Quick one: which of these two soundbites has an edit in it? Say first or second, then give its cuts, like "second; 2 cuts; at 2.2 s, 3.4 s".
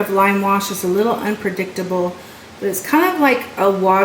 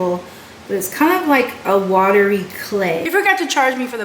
second; 1 cut; at 3.1 s